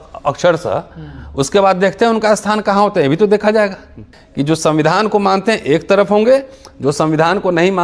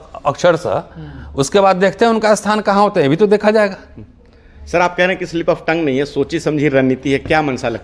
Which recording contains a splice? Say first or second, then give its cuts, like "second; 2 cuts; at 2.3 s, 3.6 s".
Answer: first; 1 cut; at 4.2 s